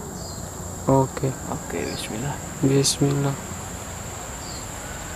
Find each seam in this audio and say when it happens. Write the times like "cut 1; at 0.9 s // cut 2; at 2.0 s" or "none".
cut 1; at 3.8 s